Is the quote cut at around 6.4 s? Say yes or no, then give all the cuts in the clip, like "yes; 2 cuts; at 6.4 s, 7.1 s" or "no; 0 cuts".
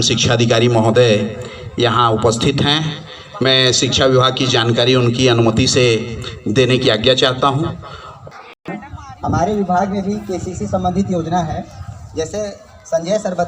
no; 1 cut; at 8.3 s